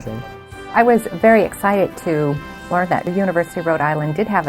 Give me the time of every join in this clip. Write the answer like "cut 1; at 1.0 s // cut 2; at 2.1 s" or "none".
cut 1; at 0.7 s // cut 2; at 3.1 s